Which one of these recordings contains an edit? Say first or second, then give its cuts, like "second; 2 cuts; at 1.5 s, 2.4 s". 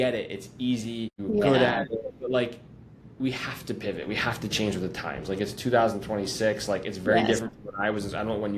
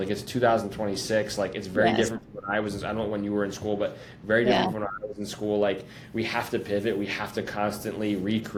first; 1 cut; at 1.5 s